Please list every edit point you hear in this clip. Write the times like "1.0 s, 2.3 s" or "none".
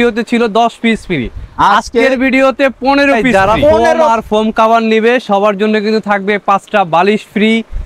4.1 s